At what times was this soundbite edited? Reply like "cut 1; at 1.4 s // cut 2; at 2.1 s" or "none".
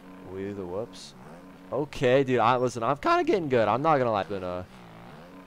cut 1; at 4.3 s